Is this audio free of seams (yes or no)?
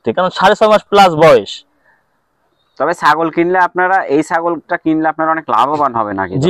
yes